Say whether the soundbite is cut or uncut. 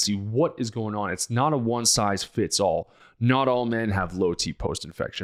uncut